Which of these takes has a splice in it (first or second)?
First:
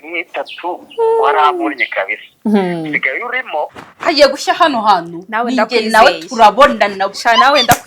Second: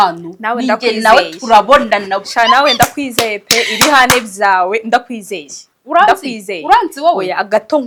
first